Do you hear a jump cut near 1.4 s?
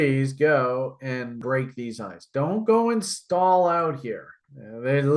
yes; 1 cut; at 1.4 s

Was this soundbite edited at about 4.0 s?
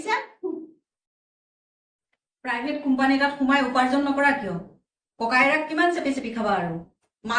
no; 1 cut; at 2.5 s

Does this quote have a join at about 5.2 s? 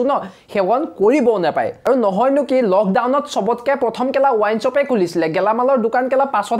no; 1 cut; at 1.8 s

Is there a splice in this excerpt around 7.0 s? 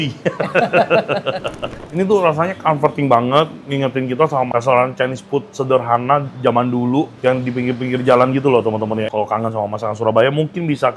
no; 3 cuts; at 1.8 s, 4.5 s, 9.1 s

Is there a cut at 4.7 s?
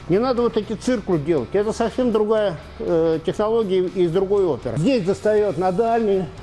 yes; 1 cut; at 4.7 s

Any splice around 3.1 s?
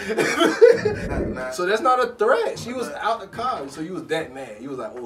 no; 1 cut; at 1.0 s

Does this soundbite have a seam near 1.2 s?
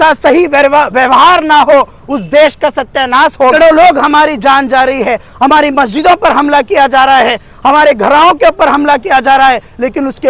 no; 1 cut; at 3.5 s

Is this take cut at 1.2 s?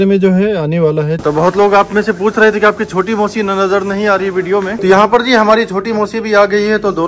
yes; 2 cuts; at 1.2 s, 4.8 s

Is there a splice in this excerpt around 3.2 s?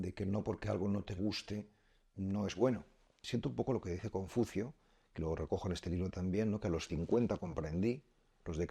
yes; 1 cut; at 3.2 s

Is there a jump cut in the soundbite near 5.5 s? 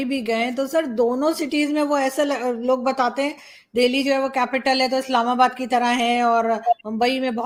no; 0 cuts

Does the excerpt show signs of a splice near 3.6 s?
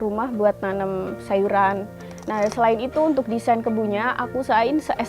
no; 1 cut; at 1.9 s

